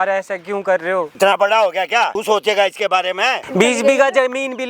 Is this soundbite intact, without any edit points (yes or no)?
no